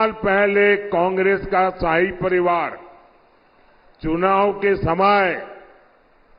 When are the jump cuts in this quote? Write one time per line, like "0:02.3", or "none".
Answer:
none